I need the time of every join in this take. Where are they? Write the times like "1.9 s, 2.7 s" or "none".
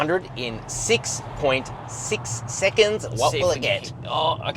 none

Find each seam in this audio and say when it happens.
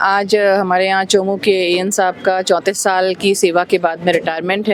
none

